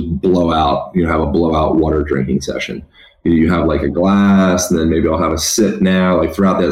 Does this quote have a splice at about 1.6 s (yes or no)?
no